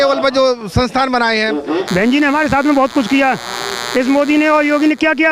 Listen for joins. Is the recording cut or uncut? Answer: cut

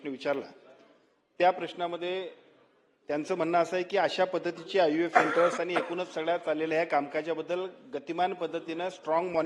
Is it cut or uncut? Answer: uncut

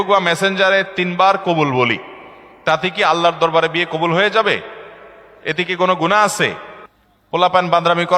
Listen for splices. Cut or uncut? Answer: uncut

